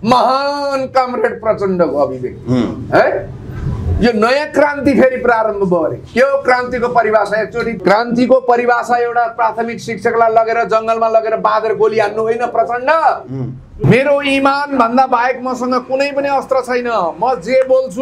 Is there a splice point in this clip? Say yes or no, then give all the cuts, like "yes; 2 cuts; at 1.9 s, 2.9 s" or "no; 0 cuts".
yes; 2 cuts; at 7.7 s, 13.7 s